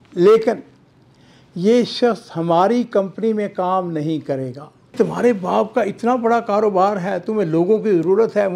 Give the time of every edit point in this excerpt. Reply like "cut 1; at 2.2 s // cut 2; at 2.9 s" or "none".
cut 1; at 4.9 s